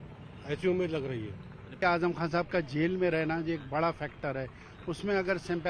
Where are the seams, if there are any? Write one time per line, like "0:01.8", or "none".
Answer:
0:01.8